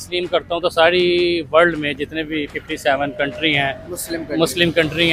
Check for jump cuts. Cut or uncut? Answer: uncut